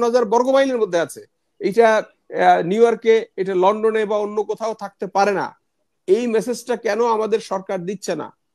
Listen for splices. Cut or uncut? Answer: uncut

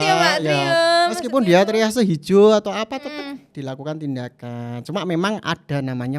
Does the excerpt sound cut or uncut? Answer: uncut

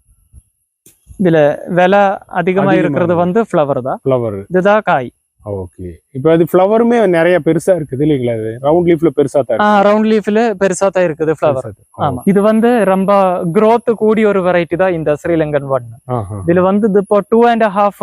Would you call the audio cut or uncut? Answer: cut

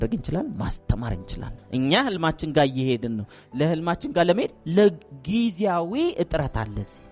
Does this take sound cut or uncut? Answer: cut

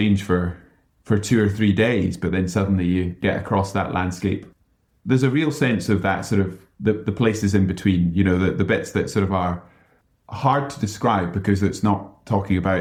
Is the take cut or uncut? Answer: uncut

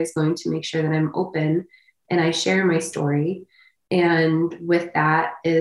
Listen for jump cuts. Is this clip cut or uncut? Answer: uncut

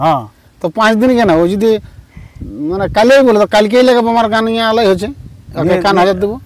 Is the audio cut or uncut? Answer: uncut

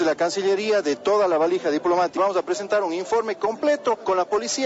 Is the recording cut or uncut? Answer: cut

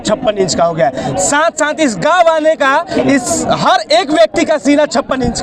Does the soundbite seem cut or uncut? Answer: uncut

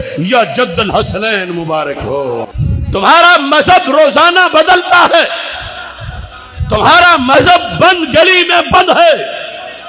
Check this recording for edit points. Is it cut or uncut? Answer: cut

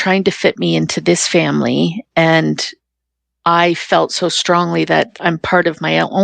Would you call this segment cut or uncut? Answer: uncut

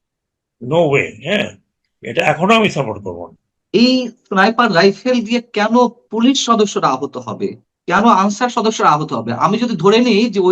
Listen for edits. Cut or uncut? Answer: cut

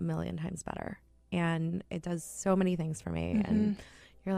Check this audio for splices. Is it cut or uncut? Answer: uncut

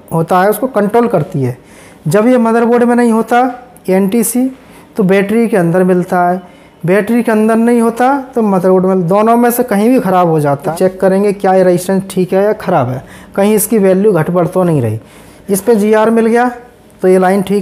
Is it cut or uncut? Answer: cut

